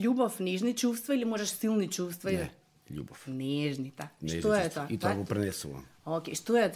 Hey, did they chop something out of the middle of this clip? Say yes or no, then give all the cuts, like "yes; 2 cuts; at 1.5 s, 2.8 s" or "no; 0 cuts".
no; 0 cuts